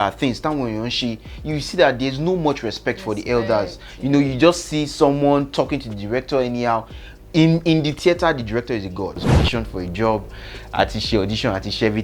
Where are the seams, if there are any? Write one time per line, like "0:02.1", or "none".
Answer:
0:09.3